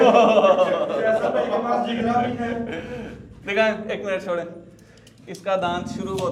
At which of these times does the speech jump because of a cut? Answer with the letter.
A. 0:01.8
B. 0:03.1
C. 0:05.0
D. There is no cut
D